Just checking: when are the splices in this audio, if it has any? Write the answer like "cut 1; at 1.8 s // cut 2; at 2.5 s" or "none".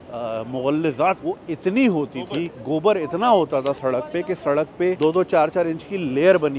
cut 1; at 1.2 s // cut 2; at 5.0 s

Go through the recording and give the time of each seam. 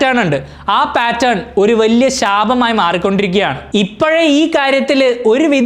cut 1; at 3.6 s

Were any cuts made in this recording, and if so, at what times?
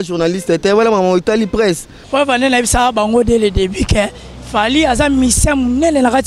cut 1; at 1.9 s

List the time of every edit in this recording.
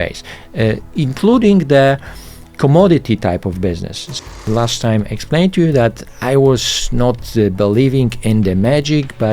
cut 1; at 4.3 s

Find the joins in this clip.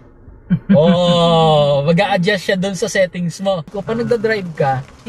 cut 1; at 3.8 s

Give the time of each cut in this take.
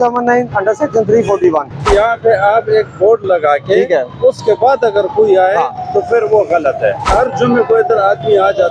cut 1; at 1.9 s // cut 2; at 7.1 s

